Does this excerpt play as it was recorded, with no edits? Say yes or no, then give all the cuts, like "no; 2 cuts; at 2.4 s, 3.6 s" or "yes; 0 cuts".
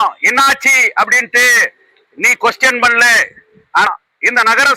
no; 1 cut; at 3.9 s